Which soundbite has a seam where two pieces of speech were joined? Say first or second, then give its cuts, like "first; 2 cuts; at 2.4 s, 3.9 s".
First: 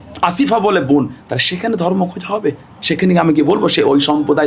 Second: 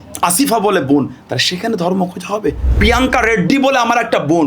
second; 1 cut; at 2.7 s